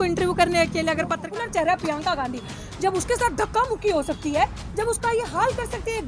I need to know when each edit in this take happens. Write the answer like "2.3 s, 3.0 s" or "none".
1.3 s